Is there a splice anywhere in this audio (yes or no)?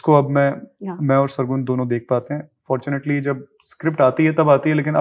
no